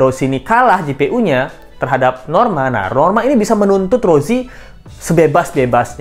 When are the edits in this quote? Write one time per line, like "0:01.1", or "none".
none